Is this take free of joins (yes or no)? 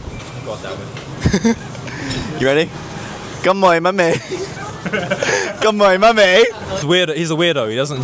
no